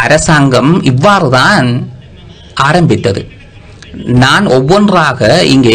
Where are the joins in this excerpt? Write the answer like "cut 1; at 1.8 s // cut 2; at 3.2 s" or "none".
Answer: none